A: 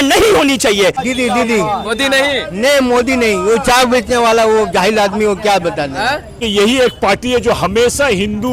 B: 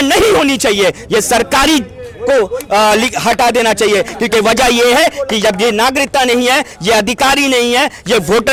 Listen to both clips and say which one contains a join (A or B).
A